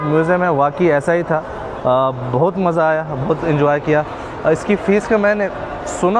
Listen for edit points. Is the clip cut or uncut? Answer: uncut